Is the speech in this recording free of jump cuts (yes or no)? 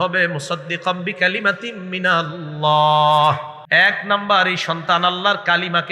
no